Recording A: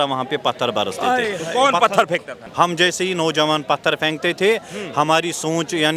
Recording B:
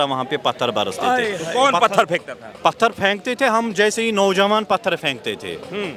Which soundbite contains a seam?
A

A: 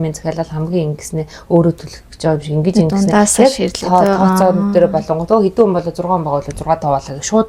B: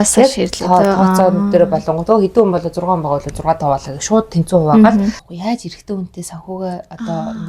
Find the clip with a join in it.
B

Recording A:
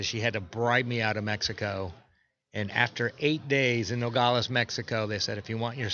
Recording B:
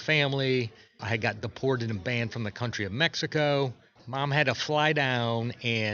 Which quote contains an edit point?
B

